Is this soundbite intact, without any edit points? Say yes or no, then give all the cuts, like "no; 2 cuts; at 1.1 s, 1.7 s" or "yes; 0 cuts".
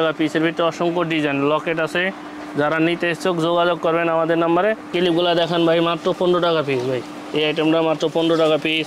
yes; 0 cuts